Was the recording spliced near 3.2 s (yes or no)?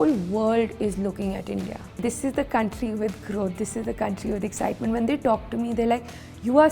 no